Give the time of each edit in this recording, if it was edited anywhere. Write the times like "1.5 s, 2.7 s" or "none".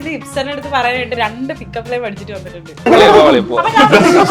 2.9 s